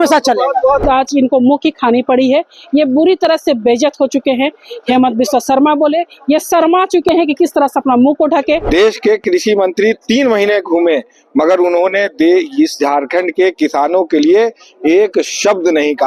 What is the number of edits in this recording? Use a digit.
2